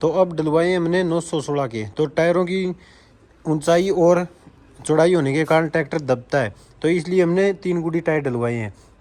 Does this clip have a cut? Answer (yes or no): no